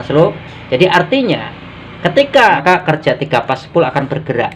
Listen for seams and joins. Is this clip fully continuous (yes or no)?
no